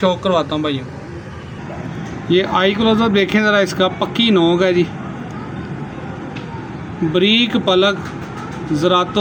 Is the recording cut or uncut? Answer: uncut